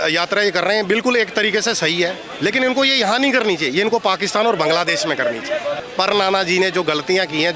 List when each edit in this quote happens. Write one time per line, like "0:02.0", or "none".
0:05.9